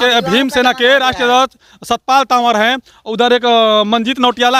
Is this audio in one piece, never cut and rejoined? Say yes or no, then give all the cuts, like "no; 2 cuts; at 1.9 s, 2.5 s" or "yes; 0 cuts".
yes; 0 cuts